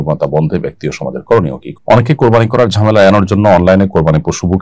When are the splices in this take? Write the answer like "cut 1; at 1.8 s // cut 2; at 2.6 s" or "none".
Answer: cut 1; at 1.6 s